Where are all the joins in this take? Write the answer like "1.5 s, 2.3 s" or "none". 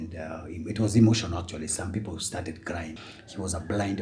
3.0 s

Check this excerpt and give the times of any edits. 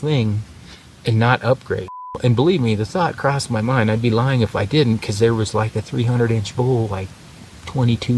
2.1 s

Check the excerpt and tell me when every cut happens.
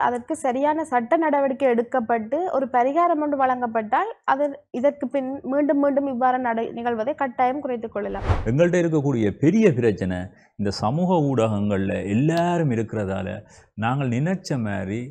8.3 s

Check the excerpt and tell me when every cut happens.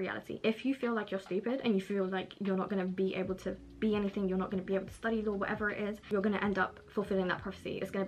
6.1 s

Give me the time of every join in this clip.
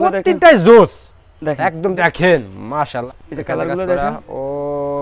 2.0 s, 3.0 s

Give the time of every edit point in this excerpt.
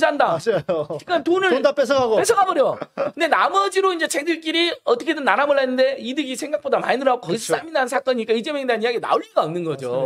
none

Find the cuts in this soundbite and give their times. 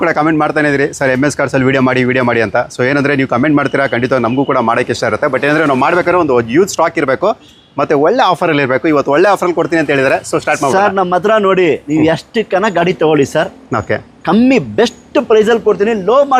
none

